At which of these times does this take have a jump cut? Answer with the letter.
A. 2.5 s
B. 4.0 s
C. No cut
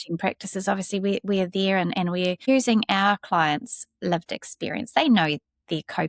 A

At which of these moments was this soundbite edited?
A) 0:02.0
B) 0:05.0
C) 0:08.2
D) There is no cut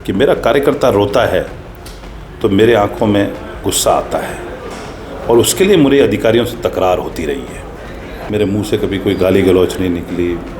C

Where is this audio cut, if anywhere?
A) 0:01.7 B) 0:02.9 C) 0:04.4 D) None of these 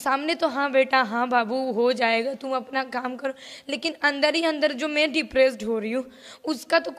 D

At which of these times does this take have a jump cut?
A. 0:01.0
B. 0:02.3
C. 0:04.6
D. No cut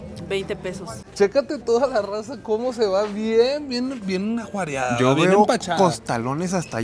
A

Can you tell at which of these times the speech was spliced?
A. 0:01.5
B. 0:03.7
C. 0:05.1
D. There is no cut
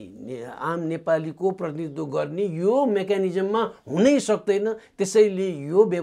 D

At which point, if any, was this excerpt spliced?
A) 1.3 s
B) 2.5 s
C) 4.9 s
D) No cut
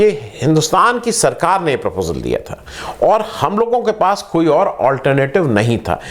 D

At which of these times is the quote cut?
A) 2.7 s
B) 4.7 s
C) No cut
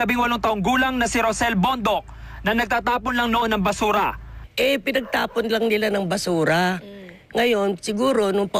C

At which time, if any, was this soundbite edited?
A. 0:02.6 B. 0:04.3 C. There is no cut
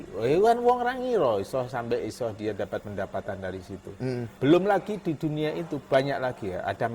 B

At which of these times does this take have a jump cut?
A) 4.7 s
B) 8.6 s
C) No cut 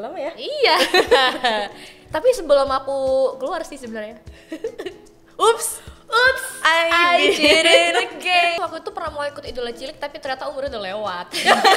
B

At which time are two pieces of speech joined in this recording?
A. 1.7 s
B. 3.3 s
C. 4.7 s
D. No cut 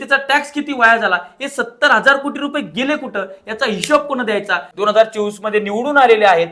C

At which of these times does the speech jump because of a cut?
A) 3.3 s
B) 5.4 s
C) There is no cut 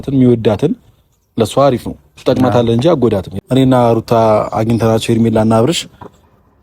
A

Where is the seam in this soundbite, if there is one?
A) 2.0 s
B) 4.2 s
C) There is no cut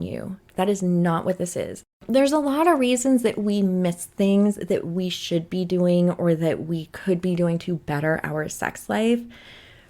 A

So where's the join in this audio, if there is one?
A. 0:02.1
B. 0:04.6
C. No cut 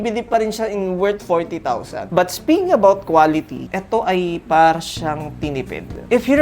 A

